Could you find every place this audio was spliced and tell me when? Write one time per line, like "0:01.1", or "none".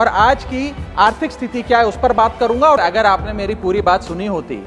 0:02.8